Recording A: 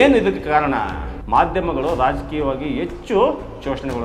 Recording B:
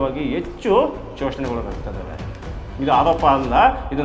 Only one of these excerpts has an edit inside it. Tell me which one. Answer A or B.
A